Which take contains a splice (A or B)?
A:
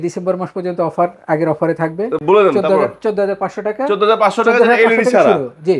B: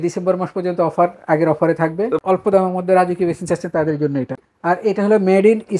B